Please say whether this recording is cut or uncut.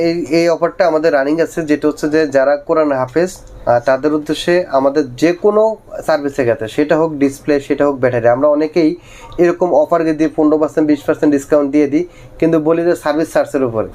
uncut